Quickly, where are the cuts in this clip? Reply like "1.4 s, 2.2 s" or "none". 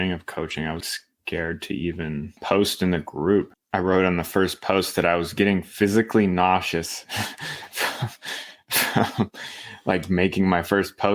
0.8 s, 2.3 s, 3.6 s